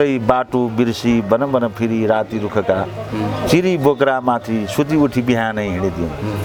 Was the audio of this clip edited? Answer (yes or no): no